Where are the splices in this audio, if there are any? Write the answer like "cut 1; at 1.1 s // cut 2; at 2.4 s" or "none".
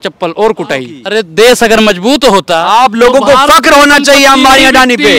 cut 1; at 1.0 s